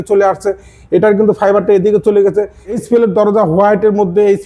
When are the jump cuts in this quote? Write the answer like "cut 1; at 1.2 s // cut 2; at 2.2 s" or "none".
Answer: cut 1; at 2.8 s